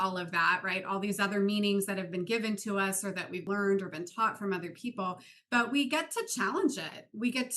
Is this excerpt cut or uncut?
cut